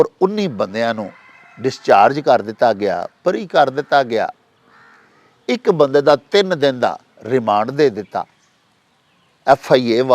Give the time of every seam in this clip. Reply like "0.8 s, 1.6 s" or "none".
none